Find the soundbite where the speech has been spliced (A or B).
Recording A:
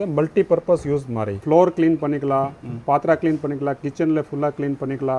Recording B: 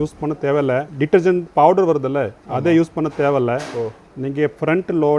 A